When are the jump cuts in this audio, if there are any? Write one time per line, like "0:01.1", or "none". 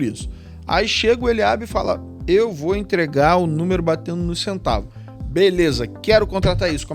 none

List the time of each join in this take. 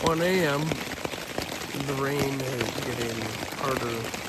none

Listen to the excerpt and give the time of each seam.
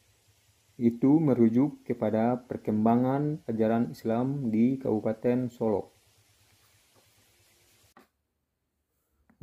0:07.9

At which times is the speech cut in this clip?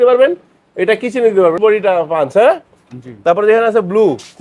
0:01.6

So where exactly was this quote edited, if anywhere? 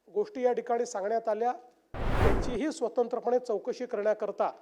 0:02.1

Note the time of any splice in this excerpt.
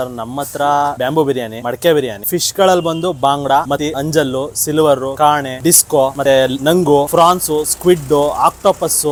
none

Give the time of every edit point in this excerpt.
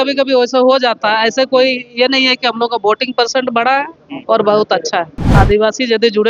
0:05.3

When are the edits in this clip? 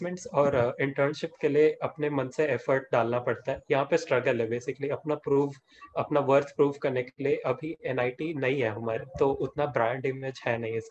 none

